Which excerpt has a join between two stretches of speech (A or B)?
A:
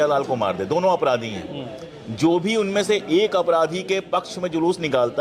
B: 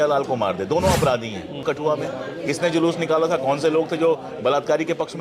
B